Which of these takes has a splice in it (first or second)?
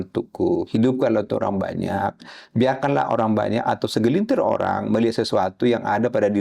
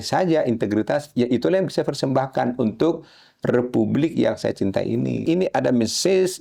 second